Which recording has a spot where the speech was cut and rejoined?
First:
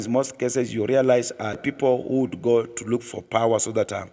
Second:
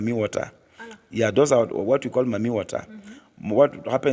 first; 1 cut; at 1.6 s

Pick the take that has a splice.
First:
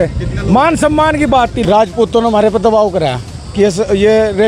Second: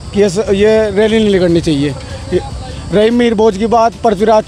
first; 1 cut; at 1.6 s

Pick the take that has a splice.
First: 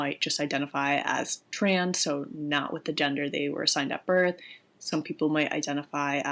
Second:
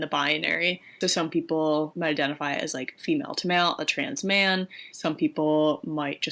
second; 3 cuts; at 0.9 s, 1.9 s, 4.8 s

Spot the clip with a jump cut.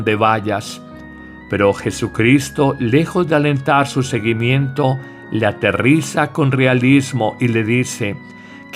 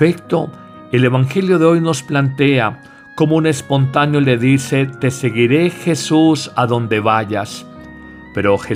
first; 1 cut; at 3.3 s

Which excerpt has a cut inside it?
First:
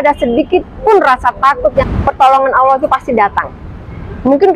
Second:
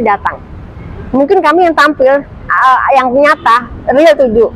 first; 1 cut; at 1.9 s

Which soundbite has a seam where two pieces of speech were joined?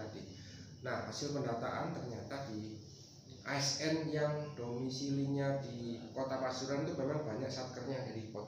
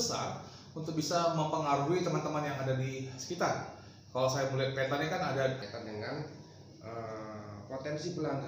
second; 1 cut; at 5.6 s

